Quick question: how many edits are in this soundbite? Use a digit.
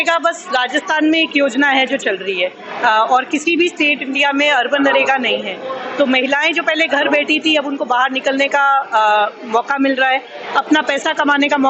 0